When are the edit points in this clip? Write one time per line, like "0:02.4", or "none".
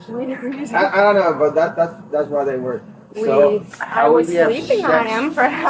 0:03.0

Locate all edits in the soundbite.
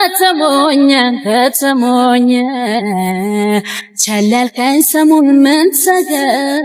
none

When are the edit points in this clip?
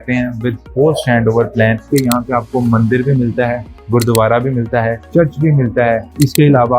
0:01.9

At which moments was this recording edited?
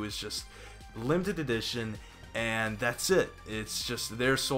0:03.0

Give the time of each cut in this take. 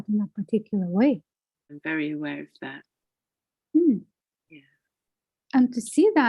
0:01.6

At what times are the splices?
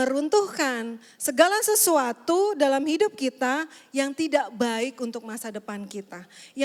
none

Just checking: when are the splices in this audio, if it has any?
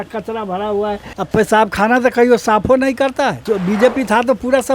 0:01.1
0:03.4

